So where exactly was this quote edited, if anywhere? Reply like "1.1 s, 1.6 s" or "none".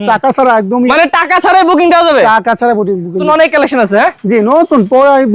0.9 s, 3.3 s